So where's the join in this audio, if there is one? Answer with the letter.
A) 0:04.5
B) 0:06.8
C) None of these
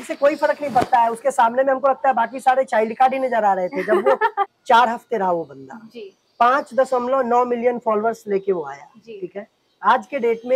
A